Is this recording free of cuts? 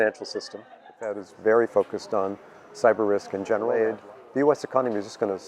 no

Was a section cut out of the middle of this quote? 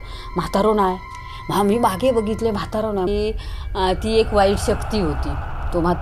yes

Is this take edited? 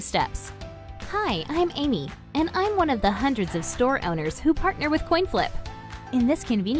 no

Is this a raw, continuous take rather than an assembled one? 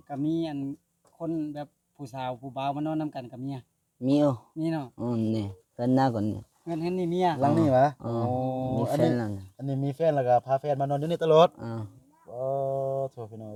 yes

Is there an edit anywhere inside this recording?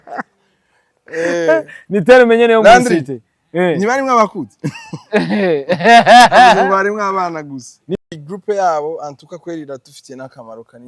yes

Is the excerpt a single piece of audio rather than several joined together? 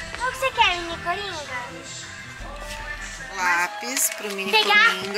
no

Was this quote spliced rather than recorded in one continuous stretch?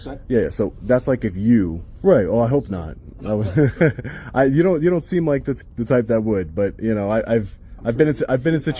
yes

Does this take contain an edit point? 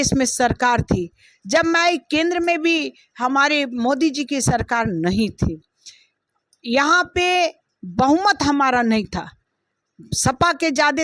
no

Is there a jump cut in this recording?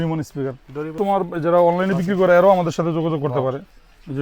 yes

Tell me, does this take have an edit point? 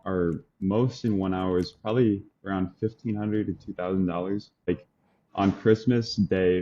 yes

